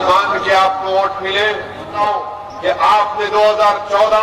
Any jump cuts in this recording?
yes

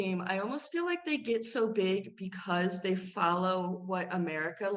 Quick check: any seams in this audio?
no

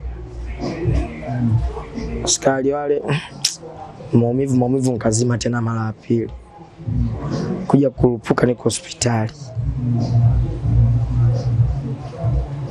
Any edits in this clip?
no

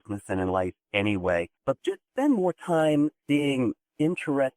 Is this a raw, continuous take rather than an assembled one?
no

